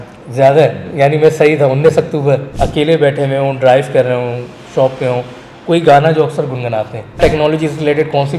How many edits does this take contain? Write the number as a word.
two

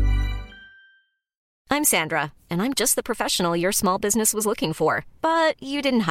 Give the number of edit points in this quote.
one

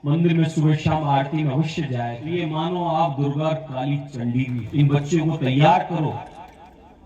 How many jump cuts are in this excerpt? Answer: two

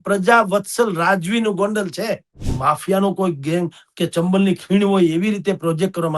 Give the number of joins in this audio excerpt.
one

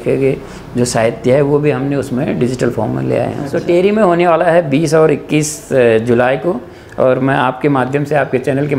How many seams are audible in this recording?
one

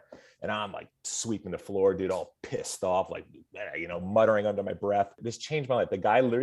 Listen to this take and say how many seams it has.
one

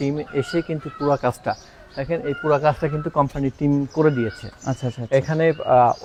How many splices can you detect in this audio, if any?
zero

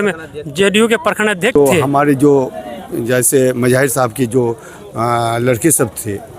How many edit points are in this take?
one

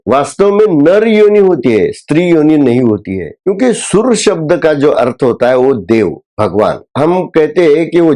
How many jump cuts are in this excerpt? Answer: two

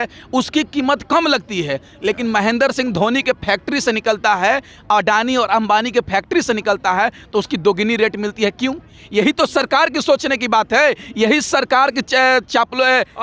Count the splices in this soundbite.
zero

